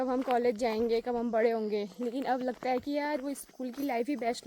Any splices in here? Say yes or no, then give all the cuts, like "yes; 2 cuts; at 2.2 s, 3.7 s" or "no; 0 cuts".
no; 0 cuts